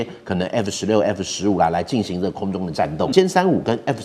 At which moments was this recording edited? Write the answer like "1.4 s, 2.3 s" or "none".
3.1 s